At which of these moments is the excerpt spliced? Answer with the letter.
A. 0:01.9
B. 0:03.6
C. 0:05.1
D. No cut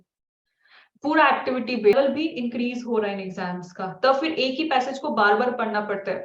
A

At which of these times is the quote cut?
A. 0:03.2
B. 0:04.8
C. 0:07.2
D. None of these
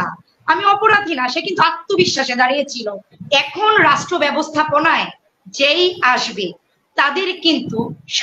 A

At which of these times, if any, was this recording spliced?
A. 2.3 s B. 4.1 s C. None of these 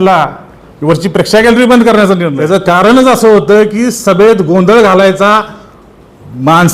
A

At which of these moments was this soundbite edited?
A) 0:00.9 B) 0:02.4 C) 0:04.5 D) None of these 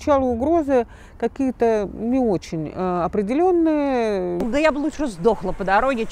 C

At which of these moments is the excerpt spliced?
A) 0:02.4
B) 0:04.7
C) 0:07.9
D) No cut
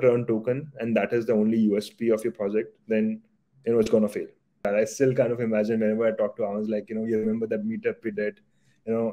B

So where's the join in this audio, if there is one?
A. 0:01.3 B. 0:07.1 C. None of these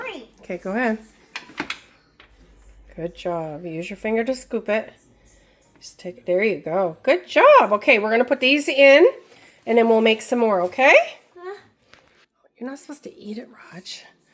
C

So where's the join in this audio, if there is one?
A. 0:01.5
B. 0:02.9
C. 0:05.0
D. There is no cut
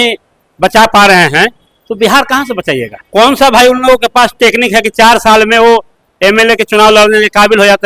B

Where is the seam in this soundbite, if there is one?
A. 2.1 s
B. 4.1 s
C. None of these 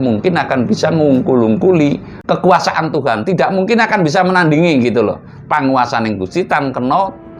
A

